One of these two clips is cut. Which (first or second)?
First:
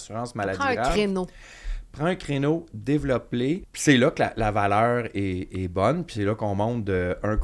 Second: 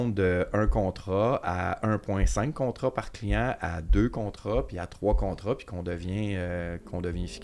first